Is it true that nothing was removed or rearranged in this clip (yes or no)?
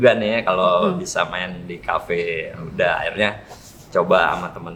yes